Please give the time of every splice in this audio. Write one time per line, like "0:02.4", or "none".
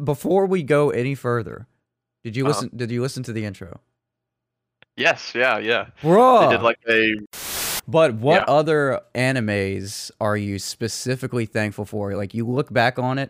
0:07.3

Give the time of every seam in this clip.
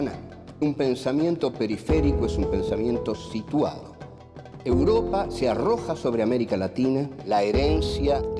none

